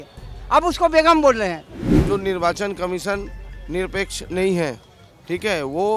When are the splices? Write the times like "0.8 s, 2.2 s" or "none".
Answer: 1.8 s